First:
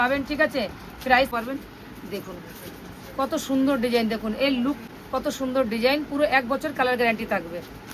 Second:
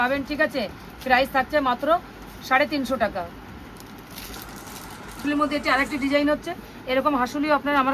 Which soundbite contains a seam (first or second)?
first